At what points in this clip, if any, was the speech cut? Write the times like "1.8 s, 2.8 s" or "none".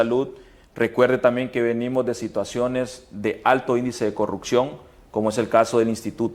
none